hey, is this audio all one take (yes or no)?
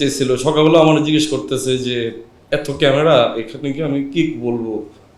no